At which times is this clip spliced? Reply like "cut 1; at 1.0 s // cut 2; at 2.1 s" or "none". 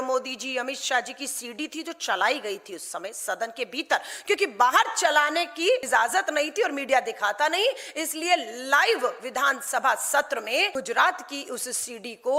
cut 1; at 5.8 s // cut 2; at 10.7 s